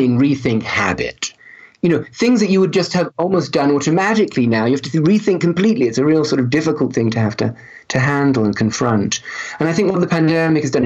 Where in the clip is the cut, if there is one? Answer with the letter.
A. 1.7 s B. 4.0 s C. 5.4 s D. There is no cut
A